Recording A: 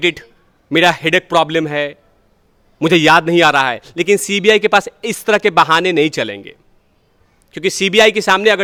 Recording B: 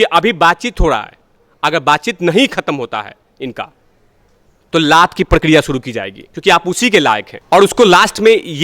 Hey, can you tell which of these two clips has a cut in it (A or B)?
B